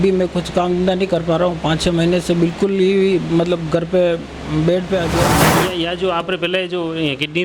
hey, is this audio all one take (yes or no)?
no